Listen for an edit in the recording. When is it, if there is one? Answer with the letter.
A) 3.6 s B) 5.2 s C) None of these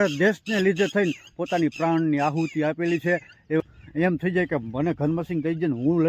A